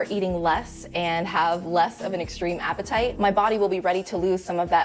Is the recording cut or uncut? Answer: uncut